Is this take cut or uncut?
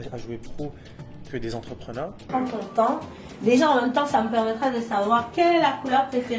cut